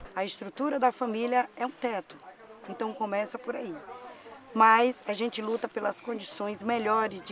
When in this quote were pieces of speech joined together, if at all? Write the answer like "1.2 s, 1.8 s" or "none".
none